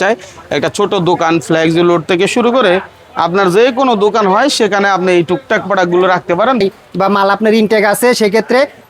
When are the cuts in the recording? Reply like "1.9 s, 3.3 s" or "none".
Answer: 6.6 s